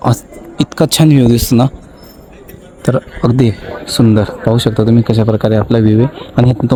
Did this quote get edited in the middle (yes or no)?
no